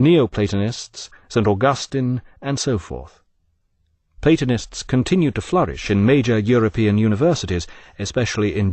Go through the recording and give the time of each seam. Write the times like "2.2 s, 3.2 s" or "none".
3.0 s